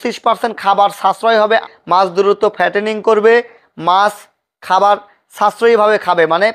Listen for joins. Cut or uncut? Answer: cut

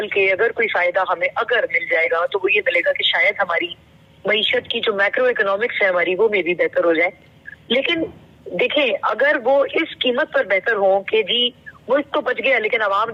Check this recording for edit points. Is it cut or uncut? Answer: uncut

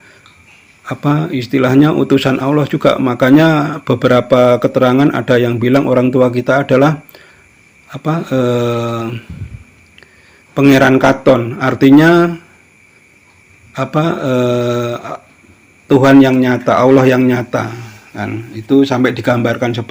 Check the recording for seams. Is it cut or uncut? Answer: uncut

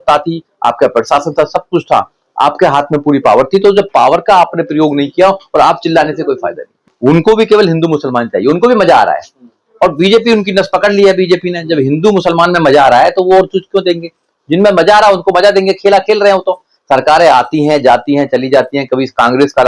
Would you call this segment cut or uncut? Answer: cut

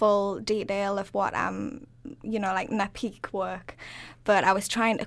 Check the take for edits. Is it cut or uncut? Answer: uncut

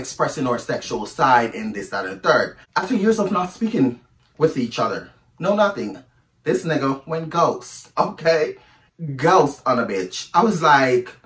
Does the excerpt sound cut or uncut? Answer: cut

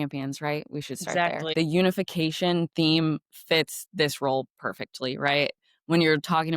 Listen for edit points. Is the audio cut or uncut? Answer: cut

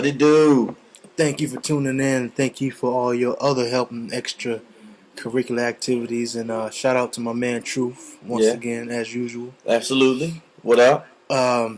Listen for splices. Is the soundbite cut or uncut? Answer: uncut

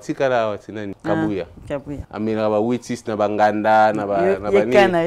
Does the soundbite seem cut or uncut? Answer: cut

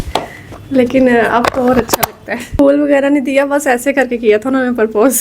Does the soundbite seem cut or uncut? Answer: cut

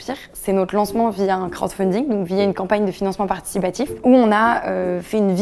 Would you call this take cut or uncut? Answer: cut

